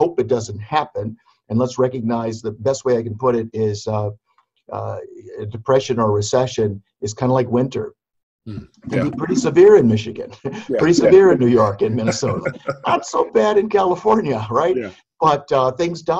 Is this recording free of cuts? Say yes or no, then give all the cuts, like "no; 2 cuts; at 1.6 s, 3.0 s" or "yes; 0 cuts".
yes; 0 cuts